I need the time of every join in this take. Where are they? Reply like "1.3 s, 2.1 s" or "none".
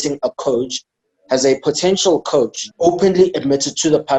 2.6 s